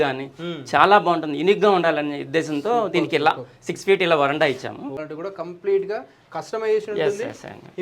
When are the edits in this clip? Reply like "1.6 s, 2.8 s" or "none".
5.0 s